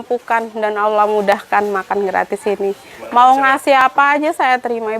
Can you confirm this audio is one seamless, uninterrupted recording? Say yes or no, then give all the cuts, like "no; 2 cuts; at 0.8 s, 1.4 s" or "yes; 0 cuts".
no; 1 cut; at 2.9 s